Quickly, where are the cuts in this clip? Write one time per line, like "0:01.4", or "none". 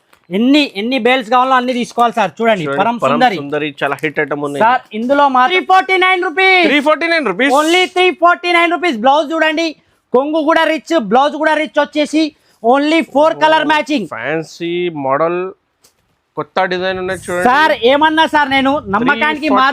0:05.5